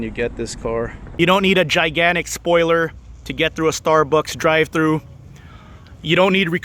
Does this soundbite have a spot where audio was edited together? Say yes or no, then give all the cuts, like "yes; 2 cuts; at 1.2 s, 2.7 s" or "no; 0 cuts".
yes; 1 cut; at 1.0 s